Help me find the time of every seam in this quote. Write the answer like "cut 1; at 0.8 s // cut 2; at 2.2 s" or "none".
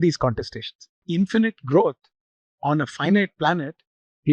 cut 1; at 1.0 s